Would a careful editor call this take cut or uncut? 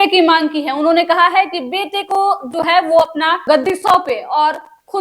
cut